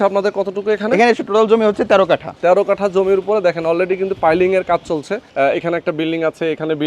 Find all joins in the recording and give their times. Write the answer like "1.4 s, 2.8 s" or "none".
1.2 s, 2.3 s, 5.2 s